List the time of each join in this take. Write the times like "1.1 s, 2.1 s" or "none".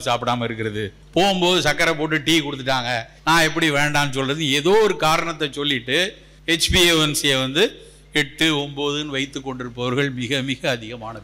0.9 s, 3.1 s, 6.3 s